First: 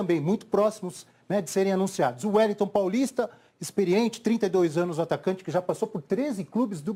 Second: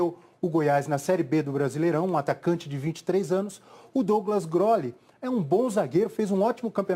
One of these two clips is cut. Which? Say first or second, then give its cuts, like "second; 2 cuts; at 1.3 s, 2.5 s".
second; 1 cut; at 2.9 s